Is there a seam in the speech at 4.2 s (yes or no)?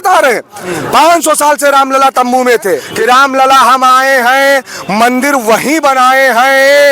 no